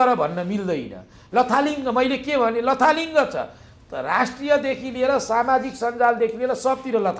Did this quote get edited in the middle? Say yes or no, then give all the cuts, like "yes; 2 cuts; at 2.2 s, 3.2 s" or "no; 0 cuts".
no; 0 cuts